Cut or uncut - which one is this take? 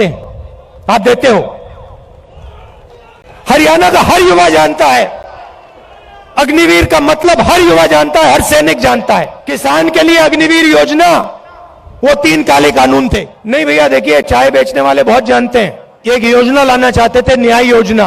cut